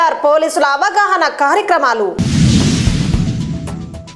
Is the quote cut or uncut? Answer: uncut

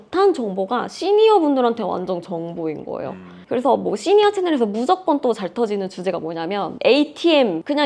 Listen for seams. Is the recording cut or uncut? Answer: uncut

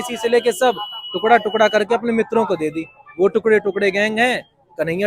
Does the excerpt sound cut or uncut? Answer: uncut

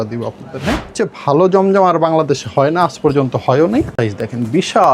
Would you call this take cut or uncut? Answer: cut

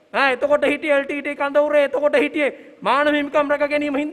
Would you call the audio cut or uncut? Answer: uncut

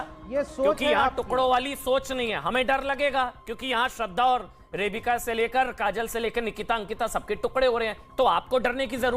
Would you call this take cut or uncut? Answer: uncut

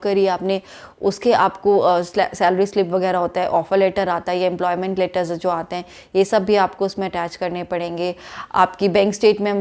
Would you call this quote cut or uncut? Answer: uncut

